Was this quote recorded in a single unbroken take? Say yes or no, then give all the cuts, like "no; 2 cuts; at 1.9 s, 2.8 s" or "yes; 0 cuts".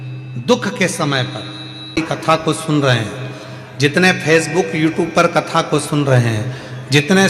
no; 1 cut; at 2.0 s